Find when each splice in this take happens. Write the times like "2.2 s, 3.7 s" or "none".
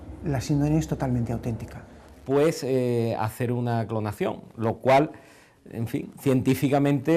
1.6 s